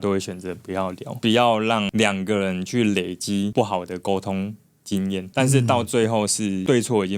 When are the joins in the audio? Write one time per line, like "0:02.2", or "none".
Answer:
0:01.2
0:05.3